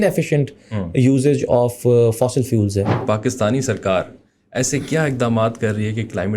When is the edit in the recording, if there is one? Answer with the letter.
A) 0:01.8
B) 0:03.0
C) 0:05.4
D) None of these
B